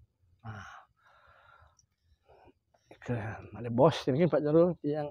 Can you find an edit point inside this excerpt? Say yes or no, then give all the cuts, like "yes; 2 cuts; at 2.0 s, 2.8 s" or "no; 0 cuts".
no; 0 cuts